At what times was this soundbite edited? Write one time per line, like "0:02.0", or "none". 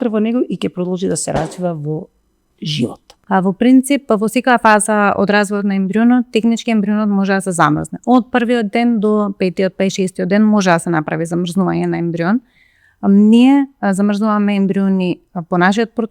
0:03.1